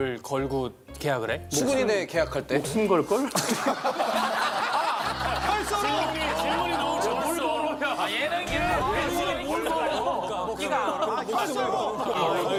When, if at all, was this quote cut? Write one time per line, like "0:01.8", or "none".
none